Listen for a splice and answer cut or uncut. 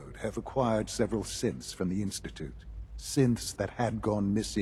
uncut